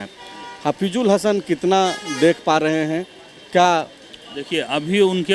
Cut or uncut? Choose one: uncut